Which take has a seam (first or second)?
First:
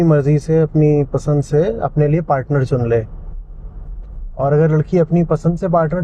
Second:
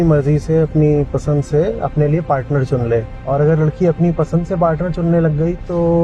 second